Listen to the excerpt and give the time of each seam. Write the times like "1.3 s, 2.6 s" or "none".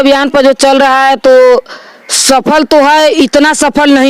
none

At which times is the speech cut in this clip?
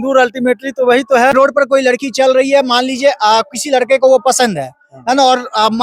1.3 s

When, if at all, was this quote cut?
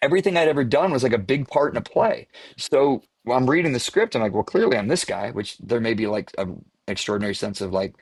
none

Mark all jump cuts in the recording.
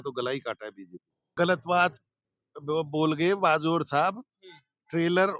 1.3 s

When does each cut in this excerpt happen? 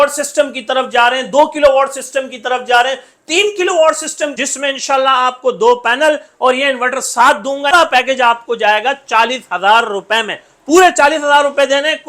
4.4 s, 7.7 s

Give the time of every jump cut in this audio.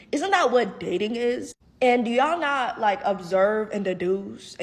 2.3 s

